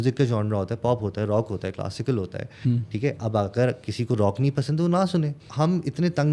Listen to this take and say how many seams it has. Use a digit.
1